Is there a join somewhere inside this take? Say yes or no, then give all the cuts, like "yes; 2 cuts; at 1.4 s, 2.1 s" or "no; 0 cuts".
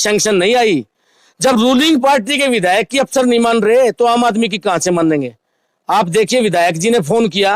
no; 0 cuts